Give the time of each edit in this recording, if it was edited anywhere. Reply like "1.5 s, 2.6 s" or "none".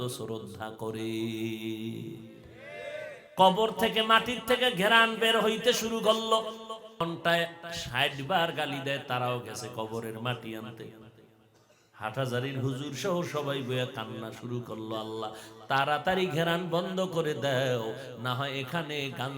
3.2 s, 7.0 s